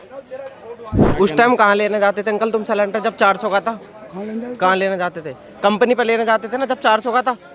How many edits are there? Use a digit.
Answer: 1